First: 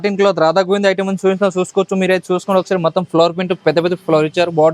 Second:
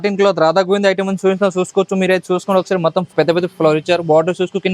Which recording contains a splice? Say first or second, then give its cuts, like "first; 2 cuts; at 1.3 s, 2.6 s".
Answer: second; 1 cut; at 3.1 s